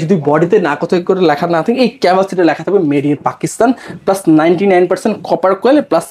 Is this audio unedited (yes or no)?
yes